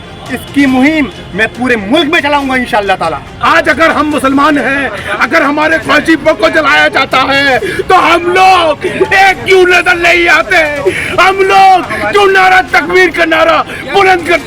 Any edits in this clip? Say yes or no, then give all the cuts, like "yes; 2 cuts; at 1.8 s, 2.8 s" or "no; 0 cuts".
yes; 1 cut; at 3.3 s